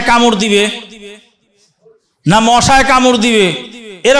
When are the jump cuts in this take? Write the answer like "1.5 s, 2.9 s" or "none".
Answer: none